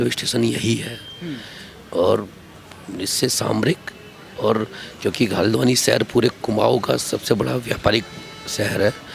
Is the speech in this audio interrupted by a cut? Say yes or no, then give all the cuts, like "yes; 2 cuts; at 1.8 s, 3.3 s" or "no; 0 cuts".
no; 0 cuts